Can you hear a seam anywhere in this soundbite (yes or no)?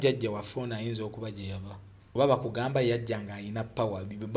yes